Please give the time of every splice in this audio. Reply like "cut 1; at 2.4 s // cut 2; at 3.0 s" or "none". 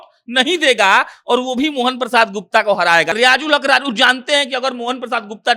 cut 1; at 3.1 s